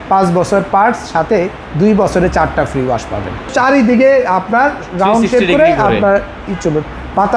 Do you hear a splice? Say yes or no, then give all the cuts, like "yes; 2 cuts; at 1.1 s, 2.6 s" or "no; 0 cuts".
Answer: yes; 1 cut; at 3.5 s